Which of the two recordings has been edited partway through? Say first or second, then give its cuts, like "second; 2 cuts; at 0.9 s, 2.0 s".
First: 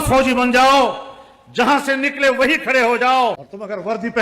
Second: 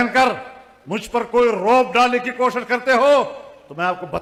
first; 1 cut; at 3.1 s